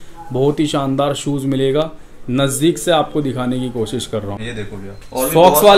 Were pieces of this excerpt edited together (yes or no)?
yes